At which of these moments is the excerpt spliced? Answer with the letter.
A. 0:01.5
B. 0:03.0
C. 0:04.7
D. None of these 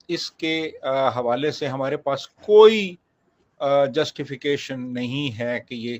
D